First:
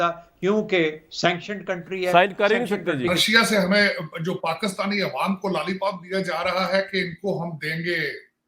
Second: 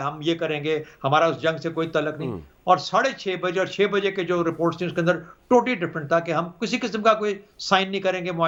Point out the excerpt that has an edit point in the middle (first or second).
first